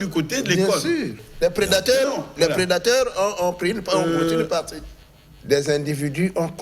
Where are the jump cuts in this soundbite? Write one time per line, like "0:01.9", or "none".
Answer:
0:01.2
0:04.8